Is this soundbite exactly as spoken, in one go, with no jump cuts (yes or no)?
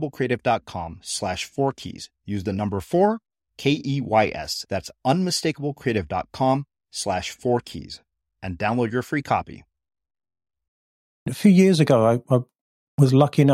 no